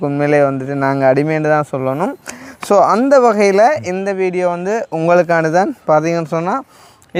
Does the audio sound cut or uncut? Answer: uncut